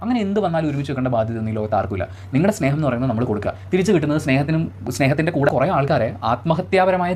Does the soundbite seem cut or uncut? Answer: cut